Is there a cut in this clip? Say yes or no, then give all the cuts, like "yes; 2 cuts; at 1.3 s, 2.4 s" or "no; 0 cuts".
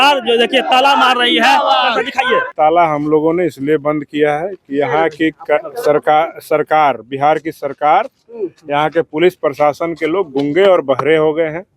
yes; 1 cut; at 2.5 s